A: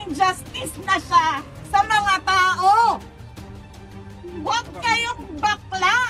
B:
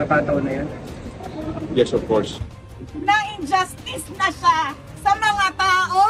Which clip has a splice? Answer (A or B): B